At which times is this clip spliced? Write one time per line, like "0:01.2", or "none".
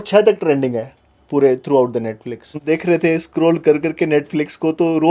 0:02.6